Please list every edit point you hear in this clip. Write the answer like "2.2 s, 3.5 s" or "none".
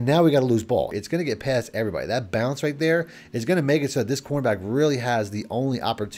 0.9 s